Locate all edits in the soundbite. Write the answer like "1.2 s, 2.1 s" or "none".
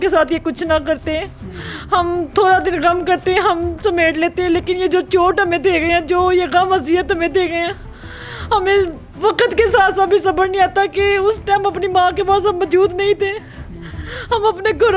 none